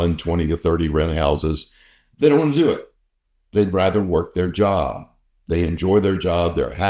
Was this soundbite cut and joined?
no; 0 cuts

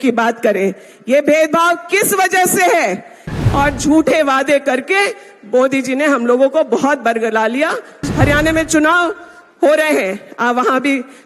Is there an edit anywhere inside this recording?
yes; 2 cuts; at 3.3 s, 8.0 s

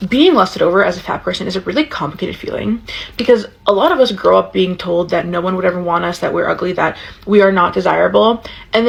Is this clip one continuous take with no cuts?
yes; 0 cuts

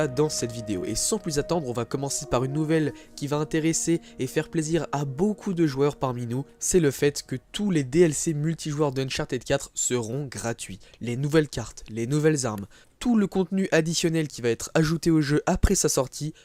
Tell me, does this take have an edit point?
no; 0 cuts

